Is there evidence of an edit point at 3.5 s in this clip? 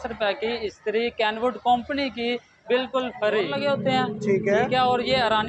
yes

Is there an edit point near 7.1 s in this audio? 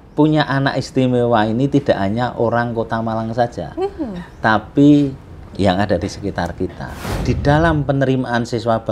yes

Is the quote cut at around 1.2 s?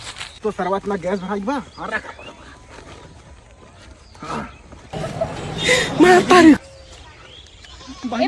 no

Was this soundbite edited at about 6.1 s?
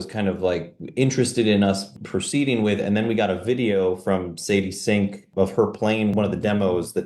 yes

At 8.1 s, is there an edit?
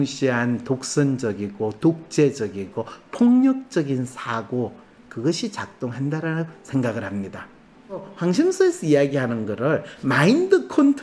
yes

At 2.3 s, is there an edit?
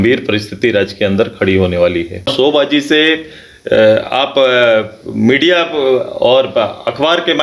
yes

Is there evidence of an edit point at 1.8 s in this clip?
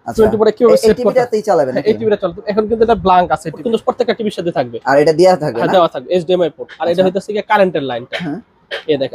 no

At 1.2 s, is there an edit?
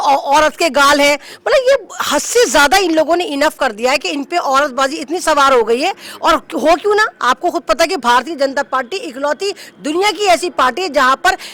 no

